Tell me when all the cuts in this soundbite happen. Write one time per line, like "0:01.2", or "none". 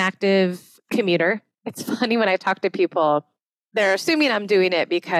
0:01.5